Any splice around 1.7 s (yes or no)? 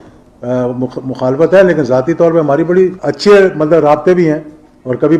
no